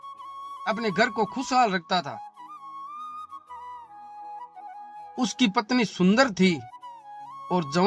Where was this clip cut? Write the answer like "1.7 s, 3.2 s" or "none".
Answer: 2.4 s, 4.5 s